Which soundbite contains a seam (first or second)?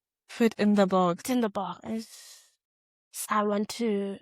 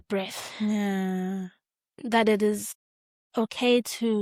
first